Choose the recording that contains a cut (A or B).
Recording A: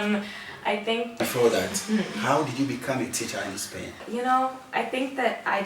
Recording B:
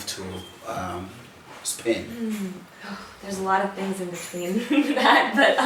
A